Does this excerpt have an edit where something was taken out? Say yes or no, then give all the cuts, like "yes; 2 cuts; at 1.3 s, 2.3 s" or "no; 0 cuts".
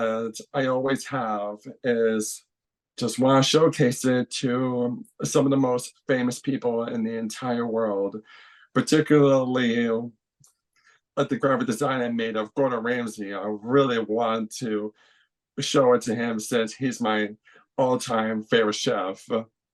no; 0 cuts